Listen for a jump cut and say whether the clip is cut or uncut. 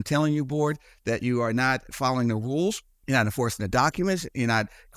cut